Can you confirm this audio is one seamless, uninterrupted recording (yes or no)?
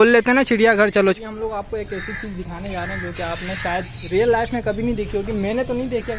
no